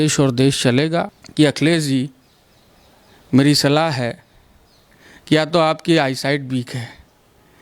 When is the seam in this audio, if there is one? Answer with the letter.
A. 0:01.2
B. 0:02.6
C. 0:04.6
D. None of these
A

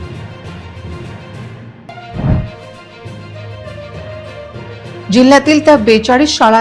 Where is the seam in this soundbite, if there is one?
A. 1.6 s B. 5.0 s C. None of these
A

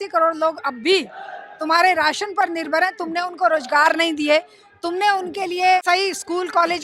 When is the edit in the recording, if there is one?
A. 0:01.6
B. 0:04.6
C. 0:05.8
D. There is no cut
C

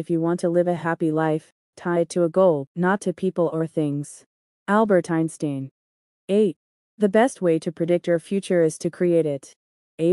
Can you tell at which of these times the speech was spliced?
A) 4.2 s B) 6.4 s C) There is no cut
B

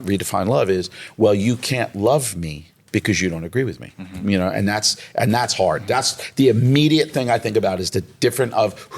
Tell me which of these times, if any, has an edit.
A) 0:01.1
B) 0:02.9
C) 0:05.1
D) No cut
D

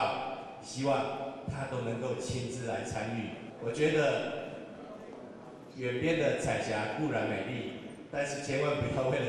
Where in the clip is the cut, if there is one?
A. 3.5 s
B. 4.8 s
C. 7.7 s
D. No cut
A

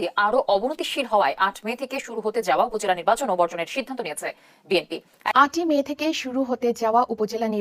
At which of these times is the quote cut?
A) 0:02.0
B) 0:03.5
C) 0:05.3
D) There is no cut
C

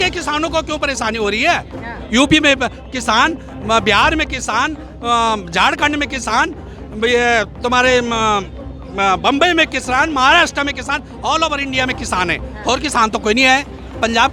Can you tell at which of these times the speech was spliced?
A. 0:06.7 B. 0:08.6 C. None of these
C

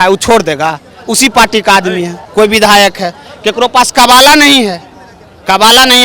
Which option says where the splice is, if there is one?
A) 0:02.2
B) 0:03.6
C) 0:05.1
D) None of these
A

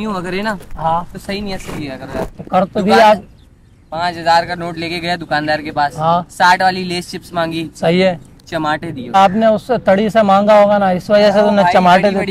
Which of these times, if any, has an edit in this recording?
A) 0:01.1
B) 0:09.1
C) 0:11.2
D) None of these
B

